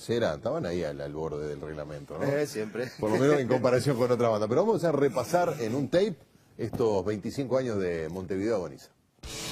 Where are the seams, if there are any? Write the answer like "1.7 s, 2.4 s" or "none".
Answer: 3.4 s

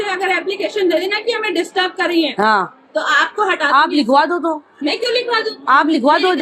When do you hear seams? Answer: none

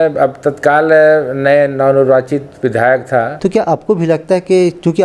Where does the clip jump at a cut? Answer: 3.3 s

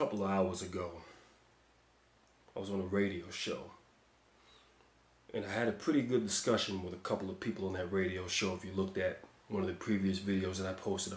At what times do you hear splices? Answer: none

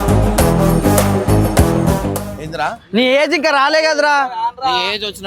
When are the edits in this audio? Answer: 2.3 s

